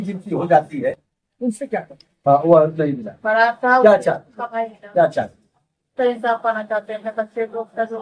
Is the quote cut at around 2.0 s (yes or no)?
yes